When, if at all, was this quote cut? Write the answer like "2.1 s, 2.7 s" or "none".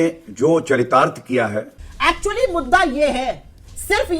1.8 s